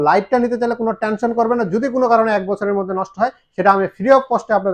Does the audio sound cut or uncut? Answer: uncut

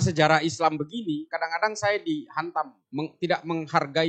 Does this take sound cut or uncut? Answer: cut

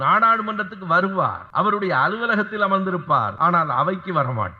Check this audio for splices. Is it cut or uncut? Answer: cut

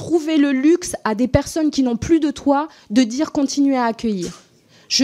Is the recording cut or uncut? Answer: uncut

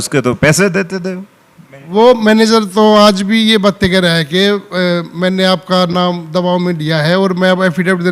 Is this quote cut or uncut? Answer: uncut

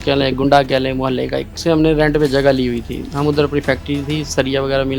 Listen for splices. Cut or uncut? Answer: cut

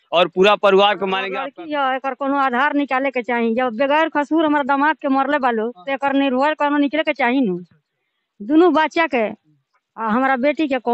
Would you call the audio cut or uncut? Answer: cut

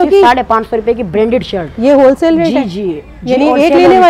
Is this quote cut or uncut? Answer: uncut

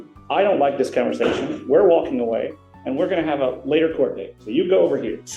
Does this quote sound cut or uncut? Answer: uncut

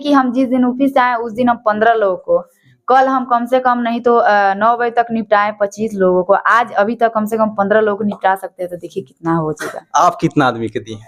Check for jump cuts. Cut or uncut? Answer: uncut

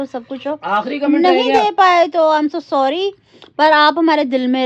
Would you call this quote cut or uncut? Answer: cut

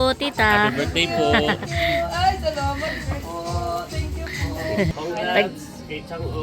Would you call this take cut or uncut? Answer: cut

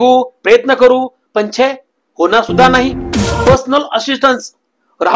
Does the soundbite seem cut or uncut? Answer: cut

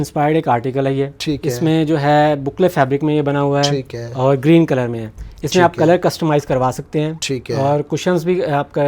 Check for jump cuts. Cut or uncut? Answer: uncut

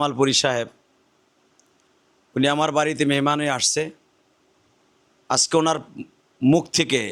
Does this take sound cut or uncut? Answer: uncut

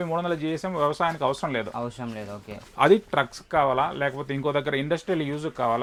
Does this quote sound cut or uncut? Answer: uncut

